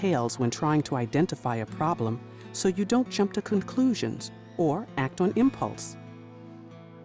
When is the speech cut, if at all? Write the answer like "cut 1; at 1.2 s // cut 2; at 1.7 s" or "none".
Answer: cut 1; at 5.7 s

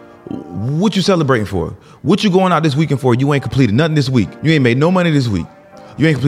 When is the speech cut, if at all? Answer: cut 1; at 4.3 s

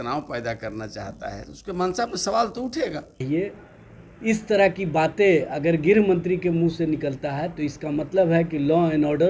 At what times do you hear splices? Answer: cut 1; at 3.2 s

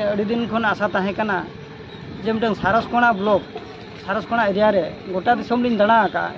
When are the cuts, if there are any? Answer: none

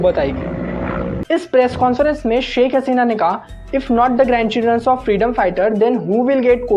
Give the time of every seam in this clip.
cut 1; at 1.3 s

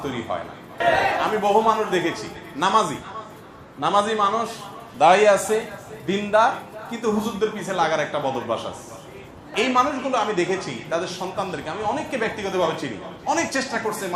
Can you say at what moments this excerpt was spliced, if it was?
cut 1; at 0.8 s // cut 2; at 9.4 s

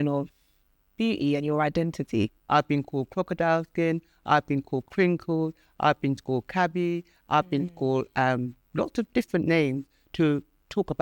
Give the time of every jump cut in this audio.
cut 1; at 2.4 s

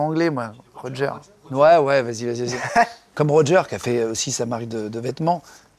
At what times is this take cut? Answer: cut 1; at 3.0 s

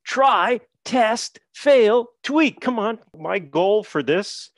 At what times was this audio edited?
cut 1; at 3.2 s

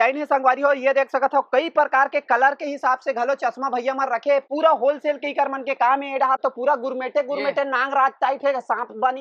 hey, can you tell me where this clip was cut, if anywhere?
none

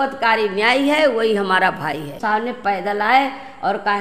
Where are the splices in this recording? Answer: cut 1; at 2.2 s

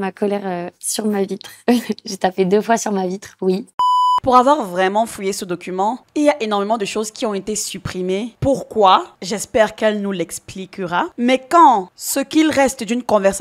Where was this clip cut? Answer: cut 1; at 3.7 s

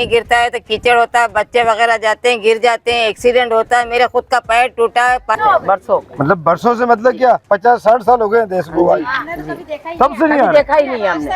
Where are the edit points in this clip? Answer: cut 1; at 5.4 s

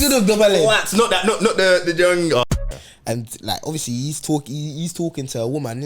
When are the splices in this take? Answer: cut 1; at 2.4 s

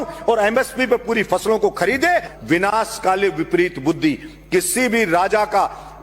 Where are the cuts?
cut 1; at 2.3 s

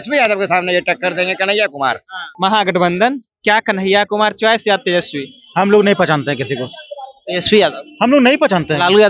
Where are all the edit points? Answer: cut 1; at 2.2 s

